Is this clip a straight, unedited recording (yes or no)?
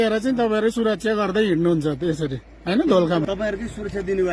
no